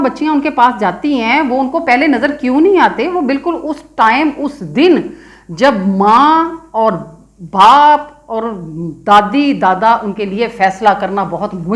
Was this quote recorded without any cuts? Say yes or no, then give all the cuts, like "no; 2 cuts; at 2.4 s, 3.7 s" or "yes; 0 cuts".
yes; 0 cuts